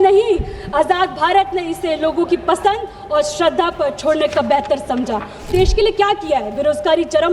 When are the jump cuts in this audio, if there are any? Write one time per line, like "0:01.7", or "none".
0:05.5